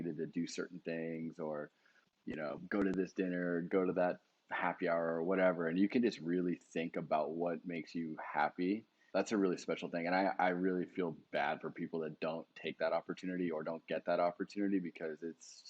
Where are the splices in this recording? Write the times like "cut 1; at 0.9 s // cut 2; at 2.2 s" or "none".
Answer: cut 1; at 9.0 s